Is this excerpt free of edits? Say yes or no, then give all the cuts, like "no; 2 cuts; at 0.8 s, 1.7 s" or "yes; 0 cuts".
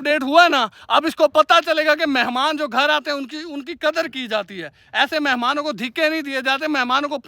yes; 0 cuts